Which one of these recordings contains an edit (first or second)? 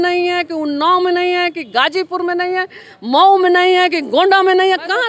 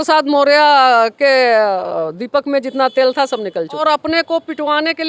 second